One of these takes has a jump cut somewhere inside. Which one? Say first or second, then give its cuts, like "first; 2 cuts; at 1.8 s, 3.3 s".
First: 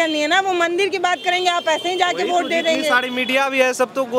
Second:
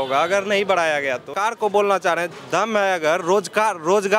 second; 1 cut; at 1.3 s